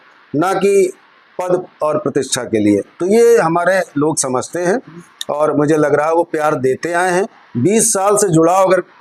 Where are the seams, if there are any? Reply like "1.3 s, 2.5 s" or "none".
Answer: none